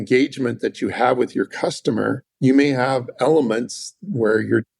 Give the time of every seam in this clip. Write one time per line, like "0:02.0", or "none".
0:02.3

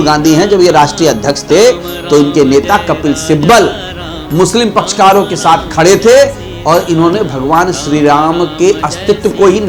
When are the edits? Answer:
none

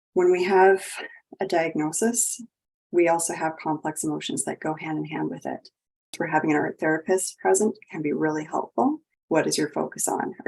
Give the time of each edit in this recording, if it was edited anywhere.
0:06.2
0:09.1

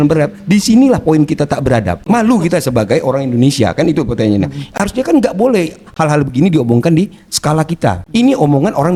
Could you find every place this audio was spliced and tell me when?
none

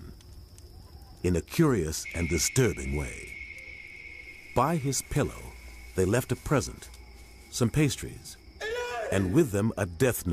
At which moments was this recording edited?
0:08.3

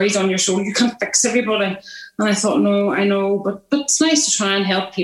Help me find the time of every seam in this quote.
none

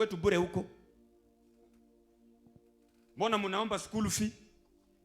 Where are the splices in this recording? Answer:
none

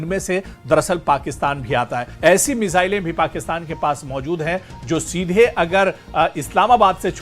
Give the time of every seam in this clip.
0:02.1

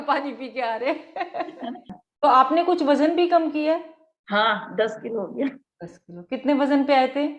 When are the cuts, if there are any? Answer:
0:01.9

